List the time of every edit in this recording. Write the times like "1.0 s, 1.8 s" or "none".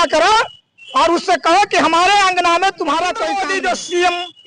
3.3 s